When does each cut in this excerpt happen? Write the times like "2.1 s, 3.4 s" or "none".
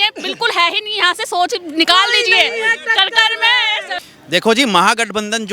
4.1 s

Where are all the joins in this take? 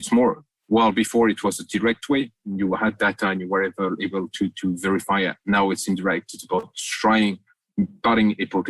none

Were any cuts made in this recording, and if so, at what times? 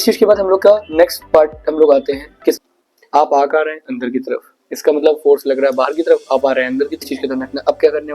2.6 s, 7.0 s

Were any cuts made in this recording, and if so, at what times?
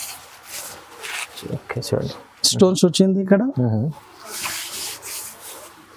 none

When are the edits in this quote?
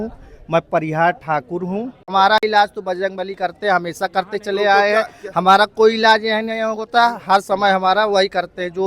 2.1 s

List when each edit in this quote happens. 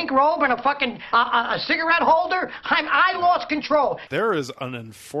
4.0 s

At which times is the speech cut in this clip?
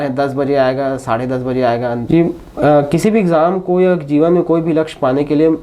2.0 s

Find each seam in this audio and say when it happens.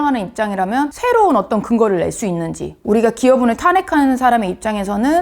0.9 s, 2.8 s

